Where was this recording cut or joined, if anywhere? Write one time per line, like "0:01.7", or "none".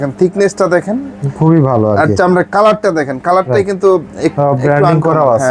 none